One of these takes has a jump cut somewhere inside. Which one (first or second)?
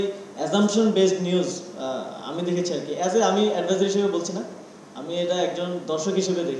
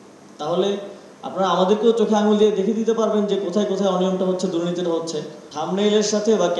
second